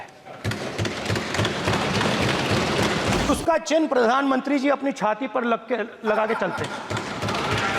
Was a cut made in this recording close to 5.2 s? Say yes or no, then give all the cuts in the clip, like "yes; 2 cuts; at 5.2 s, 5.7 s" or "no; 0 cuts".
no; 1 cut; at 3.3 s